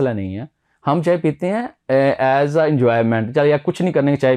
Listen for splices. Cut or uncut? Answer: uncut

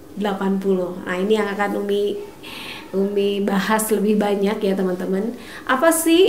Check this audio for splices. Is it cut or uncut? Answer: uncut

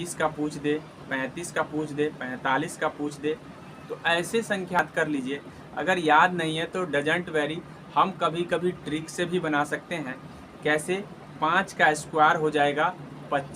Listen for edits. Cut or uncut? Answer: cut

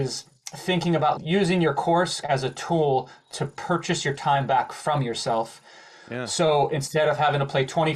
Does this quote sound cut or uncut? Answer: cut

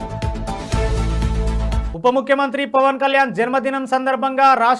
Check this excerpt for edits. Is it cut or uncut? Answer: cut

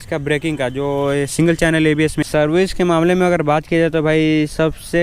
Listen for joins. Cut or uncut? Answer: cut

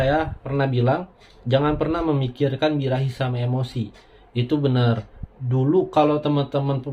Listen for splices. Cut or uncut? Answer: cut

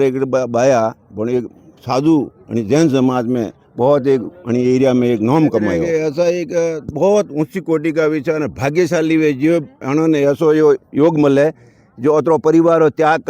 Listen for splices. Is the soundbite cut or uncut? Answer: cut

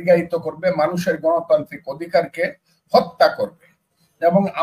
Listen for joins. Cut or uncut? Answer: uncut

